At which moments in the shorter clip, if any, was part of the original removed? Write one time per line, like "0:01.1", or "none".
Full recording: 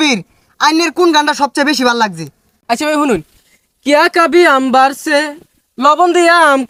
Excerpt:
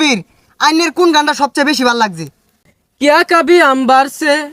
0:02.5